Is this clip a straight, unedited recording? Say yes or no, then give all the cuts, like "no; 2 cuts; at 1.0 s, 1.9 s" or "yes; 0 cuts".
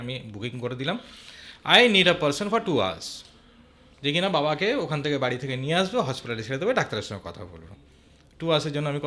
yes; 0 cuts